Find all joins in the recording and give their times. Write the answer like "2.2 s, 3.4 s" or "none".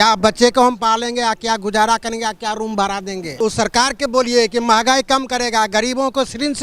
3.4 s